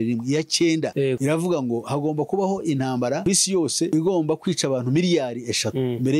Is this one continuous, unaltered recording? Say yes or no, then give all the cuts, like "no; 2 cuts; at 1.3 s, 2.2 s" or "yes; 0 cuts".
yes; 0 cuts